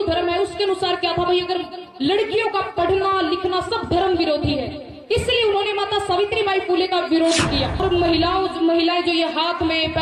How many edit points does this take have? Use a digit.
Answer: 1